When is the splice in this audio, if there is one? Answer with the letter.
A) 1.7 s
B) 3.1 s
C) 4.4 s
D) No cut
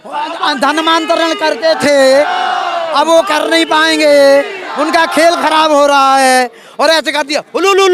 D